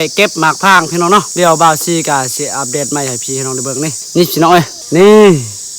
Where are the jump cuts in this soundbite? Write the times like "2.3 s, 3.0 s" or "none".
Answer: 1.3 s, 4.0 s, 4.8 s